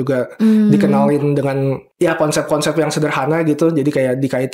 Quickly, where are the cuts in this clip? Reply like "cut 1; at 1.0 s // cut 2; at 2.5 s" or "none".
none